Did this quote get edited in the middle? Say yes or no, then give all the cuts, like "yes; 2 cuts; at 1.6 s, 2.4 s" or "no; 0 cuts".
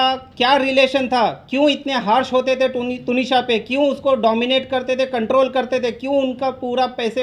no; 0 cuts